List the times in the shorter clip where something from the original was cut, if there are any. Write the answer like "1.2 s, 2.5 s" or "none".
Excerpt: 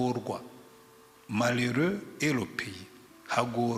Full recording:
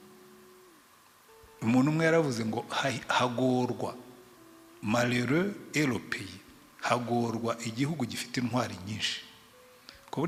none